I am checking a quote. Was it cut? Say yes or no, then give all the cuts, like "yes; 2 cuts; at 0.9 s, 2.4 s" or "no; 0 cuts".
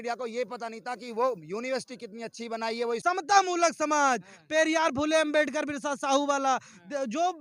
yes; 1 cut; at 3.0 s